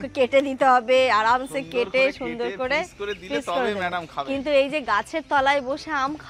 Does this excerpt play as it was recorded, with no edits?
yes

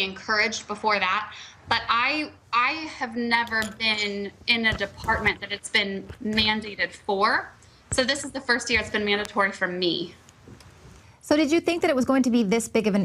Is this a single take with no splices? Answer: yes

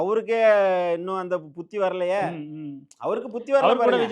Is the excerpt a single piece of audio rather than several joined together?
yes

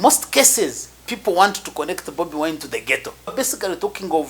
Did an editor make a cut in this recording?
yes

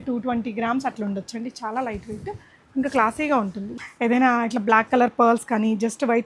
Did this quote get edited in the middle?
yes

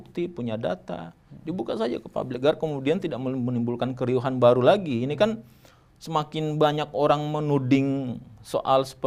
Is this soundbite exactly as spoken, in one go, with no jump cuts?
yes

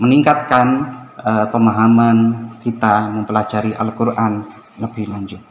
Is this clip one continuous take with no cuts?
yes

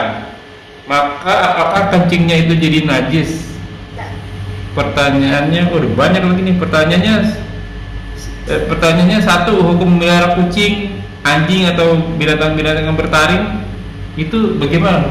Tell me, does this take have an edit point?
no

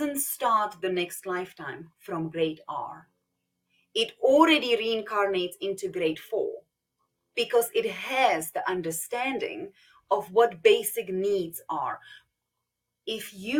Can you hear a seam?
yes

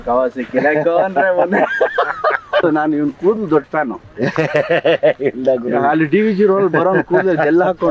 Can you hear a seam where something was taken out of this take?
yes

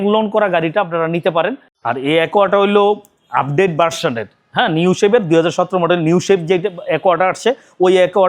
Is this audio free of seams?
no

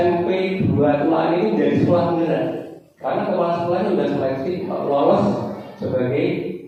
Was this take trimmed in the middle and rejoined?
no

